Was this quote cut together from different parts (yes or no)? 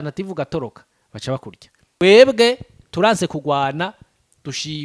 yes